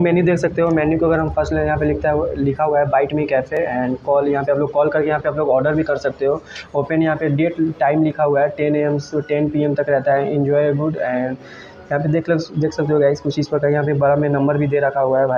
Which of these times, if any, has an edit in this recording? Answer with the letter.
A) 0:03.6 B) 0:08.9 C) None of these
C